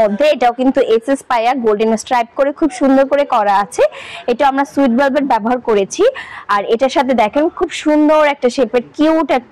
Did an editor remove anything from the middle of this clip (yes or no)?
no